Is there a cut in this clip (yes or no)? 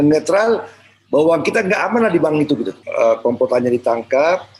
yes